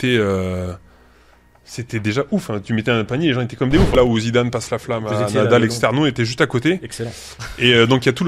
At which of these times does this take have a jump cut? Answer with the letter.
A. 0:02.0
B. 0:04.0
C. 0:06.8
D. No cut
B